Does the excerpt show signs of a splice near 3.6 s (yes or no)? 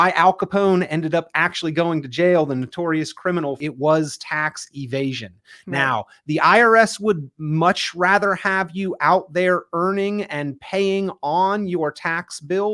yes